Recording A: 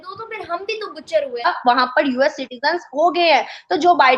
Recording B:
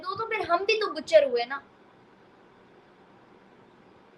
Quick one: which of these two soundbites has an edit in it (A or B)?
A